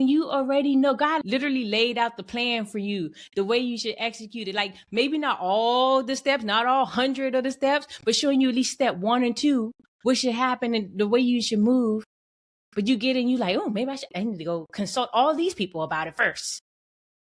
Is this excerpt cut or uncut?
cut